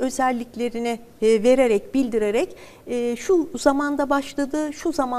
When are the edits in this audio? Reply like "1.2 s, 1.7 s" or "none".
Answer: none